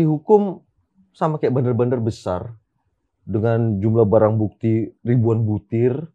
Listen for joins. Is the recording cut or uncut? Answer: uncut